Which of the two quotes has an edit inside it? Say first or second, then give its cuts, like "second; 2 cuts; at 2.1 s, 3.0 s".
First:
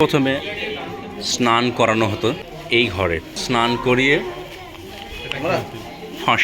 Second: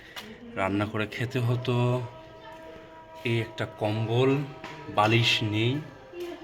first; 2 cuts; at 2.4 s, 3.3 s